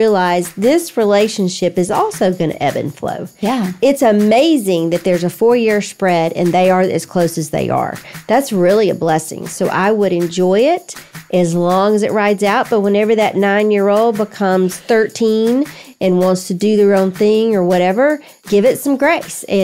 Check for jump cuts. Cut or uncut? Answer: cut